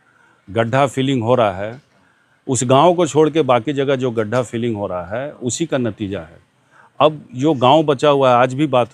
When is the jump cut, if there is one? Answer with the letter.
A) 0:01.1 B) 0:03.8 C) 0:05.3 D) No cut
D